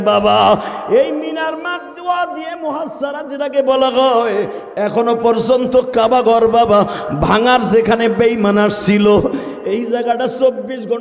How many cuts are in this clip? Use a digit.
0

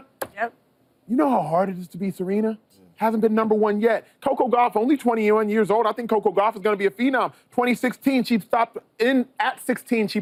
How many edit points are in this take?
0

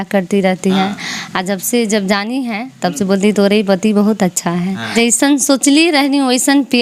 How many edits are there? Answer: 1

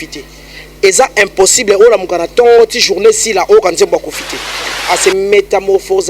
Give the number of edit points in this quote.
1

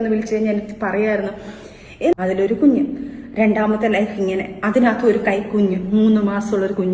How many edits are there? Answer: 1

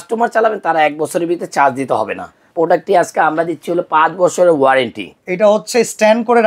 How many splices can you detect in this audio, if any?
2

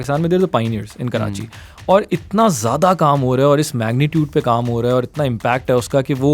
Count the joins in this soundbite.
0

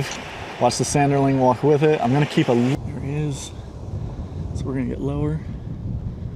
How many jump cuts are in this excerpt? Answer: 1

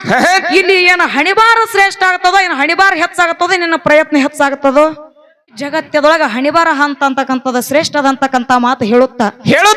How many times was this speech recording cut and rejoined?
1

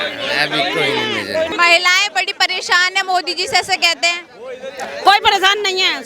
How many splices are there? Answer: 1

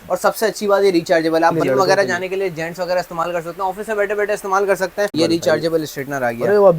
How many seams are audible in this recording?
2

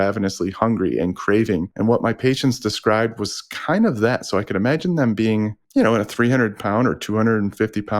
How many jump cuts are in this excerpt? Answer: 2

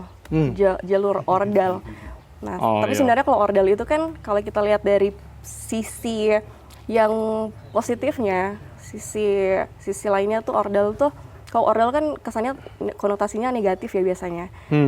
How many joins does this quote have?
0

